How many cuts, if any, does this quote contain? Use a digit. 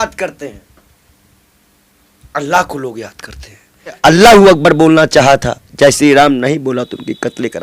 1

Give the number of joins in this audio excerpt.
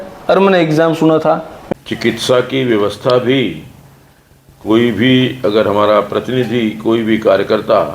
1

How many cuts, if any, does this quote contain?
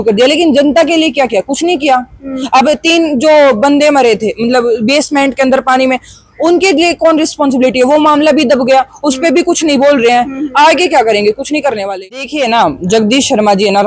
1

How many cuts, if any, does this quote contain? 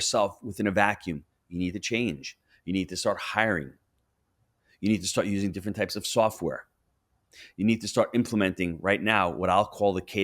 0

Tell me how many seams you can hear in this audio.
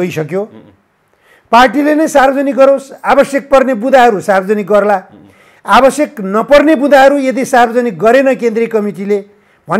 0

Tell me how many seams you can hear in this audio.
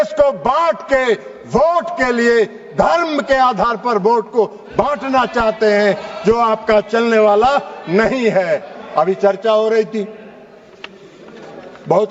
0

